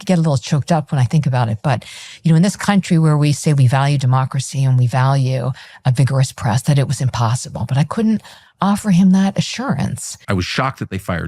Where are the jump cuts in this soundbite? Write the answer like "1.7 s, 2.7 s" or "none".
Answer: 10.2 s